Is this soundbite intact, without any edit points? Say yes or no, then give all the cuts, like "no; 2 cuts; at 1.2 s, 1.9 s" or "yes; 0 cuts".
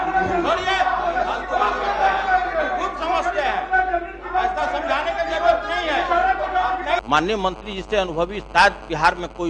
no; 1 cut; at 6.9 s